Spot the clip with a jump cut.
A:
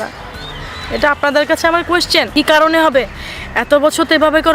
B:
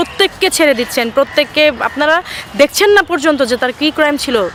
A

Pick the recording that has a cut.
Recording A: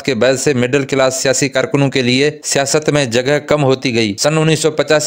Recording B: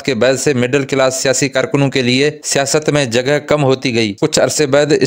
B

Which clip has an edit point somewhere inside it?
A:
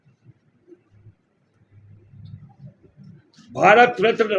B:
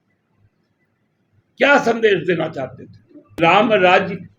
B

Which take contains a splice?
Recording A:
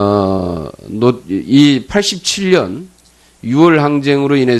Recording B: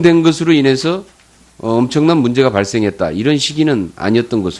A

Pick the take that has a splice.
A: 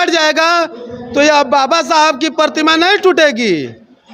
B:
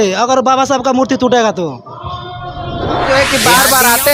B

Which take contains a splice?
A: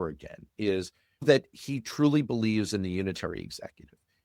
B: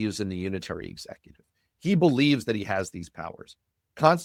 A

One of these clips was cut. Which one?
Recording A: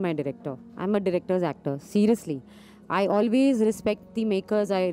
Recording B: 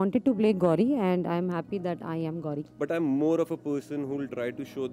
B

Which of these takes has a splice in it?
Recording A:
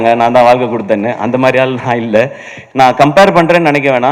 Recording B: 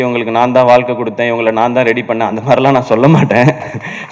A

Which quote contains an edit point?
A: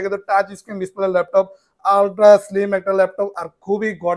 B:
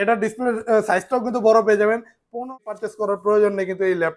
B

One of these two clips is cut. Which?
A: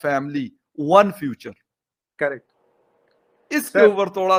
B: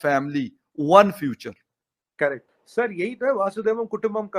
B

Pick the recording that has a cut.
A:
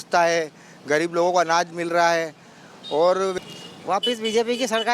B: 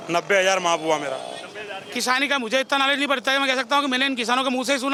A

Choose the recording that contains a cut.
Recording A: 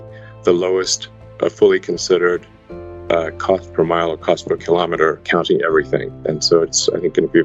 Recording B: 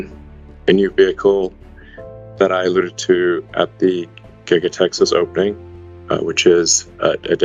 A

